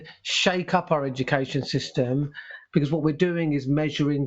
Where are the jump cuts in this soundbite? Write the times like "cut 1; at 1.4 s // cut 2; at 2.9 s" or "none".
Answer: cut 1; at 2.5 s